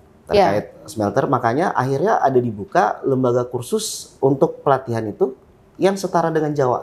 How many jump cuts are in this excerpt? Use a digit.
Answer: 0